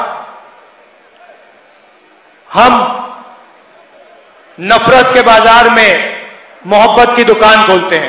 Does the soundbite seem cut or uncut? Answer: uncut